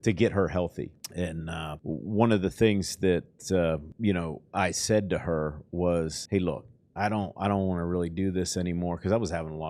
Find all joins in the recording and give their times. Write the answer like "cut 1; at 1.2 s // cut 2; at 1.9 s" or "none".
cut 1; at 1.0 s // cut 2; at 1.8 s // cut 3; at 3.9 s // cut 4; at 6.2 s